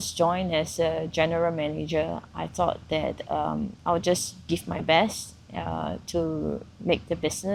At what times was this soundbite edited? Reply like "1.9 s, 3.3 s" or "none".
none